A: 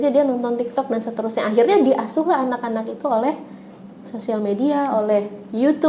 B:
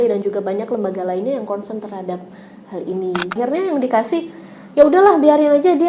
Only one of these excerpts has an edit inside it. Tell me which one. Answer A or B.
B